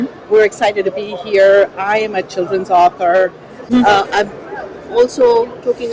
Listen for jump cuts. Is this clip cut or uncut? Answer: cut